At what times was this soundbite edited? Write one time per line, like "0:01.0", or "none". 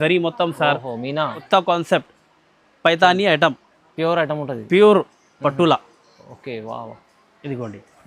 0:01.4